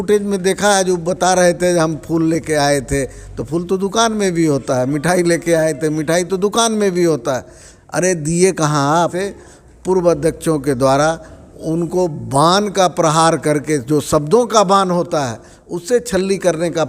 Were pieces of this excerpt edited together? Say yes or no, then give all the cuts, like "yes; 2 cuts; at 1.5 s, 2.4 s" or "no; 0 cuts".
yes; 1 cut; at 9.1 s